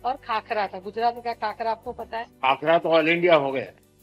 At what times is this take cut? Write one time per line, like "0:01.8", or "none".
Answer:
0:02.3